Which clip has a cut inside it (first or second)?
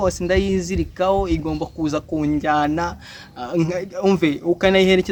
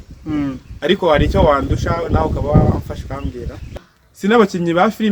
second